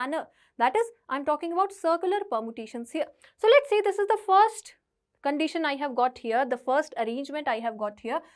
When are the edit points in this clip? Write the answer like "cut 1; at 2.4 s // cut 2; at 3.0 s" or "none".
none